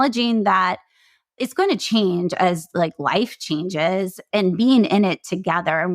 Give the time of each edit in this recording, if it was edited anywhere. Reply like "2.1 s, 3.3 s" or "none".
4.2 s

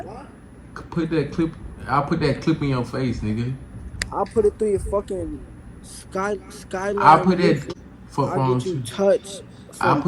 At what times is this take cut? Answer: 7.6 s

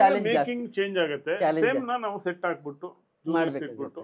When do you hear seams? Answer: none

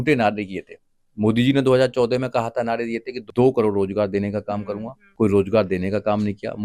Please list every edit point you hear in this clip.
3.2 s, 5.0 s

